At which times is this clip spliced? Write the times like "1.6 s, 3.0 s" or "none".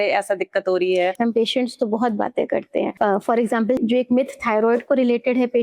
1.1 s, 2.9 s, 3.8 s